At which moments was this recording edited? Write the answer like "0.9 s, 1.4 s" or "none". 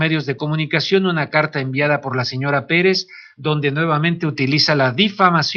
3.4 s